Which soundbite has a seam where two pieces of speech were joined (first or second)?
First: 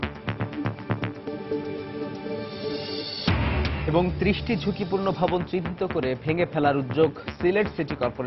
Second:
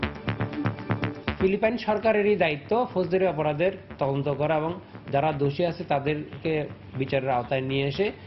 second